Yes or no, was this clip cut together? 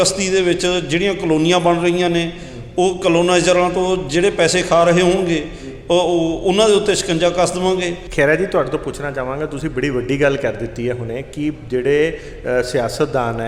yes